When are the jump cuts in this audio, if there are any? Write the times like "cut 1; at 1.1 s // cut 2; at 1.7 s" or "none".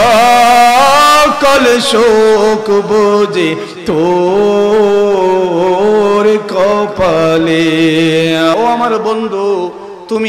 cut 1; at 8.5 s